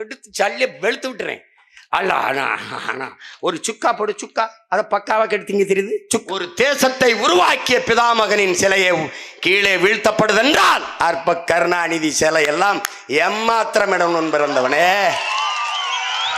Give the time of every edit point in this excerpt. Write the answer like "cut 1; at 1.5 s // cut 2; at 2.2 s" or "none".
cut 1; at 6.2 s